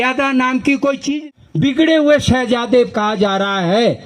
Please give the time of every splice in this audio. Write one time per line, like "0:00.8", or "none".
0:01.6